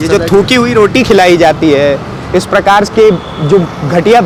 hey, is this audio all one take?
yes; 0 cuts

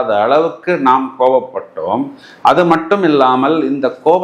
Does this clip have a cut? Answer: no; 0 cuts

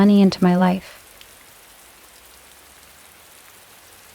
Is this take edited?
yes; 1 cut; at 1.0 s

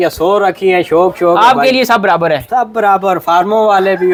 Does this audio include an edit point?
no; 0 cuts

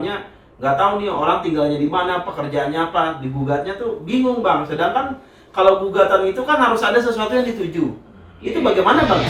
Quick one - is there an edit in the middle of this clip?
no; 0 cuts

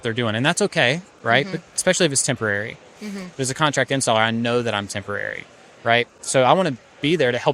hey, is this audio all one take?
yes; 0 cuts

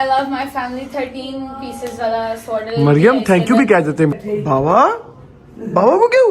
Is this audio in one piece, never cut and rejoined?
no; 1 cut; at 4.1 s

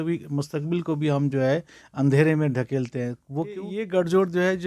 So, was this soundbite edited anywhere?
yes; 1 cut; at 3.7 s

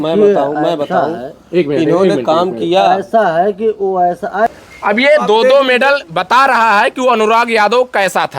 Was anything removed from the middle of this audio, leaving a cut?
yes; 1 cut; at 4.5 s

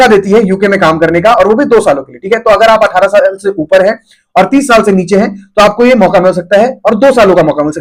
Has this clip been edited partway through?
no; 0 cuts

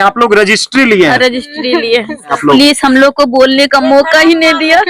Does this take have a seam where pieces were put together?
yes; 1 cut; at 2.4 s

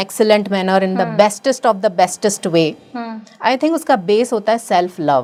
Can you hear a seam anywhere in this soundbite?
no; 0 cuts

